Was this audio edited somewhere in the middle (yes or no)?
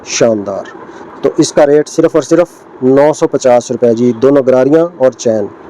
no